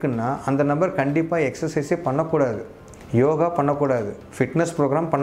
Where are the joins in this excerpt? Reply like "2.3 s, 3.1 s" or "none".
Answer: none